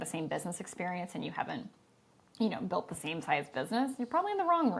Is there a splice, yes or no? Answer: no